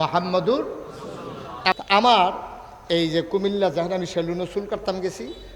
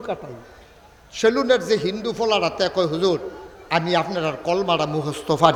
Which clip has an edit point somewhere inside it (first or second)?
first